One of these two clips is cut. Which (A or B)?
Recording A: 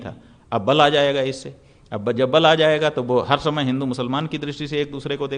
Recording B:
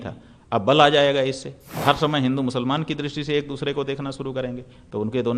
B